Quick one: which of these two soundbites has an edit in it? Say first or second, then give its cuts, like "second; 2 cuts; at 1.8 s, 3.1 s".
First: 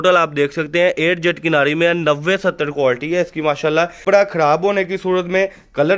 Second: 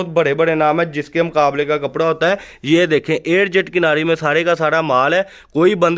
first; 1 cut; at 4.0 s